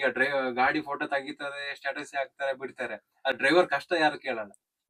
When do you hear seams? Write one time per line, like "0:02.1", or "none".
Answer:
none